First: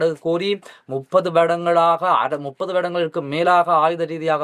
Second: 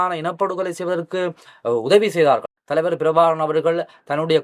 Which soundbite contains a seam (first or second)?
second